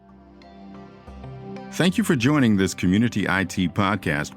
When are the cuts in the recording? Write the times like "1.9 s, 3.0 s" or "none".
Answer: 1.0 s